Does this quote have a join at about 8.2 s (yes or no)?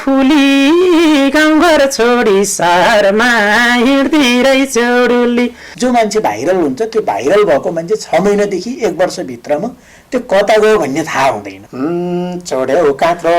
no